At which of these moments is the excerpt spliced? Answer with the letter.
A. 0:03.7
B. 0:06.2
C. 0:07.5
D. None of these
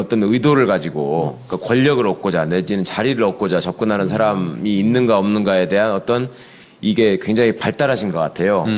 D